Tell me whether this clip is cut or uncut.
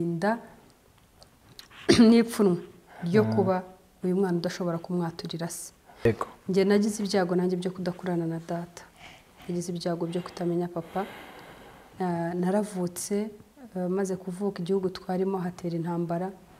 cut